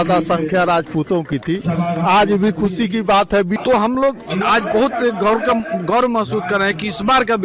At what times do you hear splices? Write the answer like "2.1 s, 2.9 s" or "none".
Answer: 3.6 s

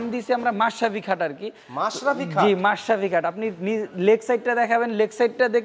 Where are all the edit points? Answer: none

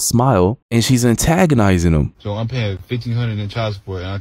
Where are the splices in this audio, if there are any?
2.2 s

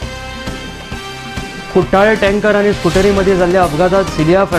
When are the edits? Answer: none

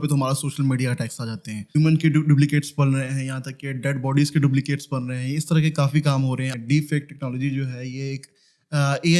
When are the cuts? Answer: 1.8 s, 6.5 s

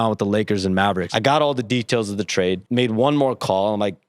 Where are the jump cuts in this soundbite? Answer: 1.1 s, 2.6 s

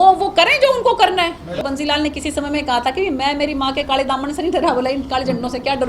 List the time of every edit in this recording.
1.6 s

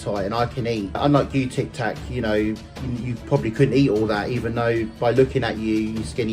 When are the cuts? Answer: 1.0 s

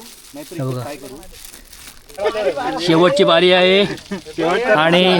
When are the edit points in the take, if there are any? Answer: 2.2 s

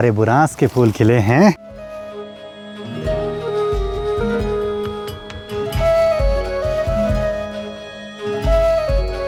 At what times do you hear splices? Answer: none

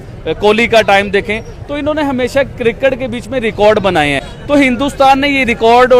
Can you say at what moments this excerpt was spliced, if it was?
4.3 s

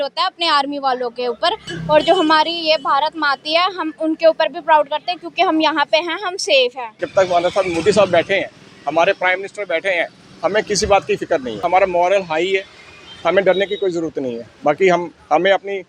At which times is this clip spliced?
1.7 s, 7.0 s, 11.6 s

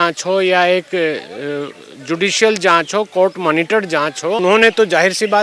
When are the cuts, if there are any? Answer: 4.4 s

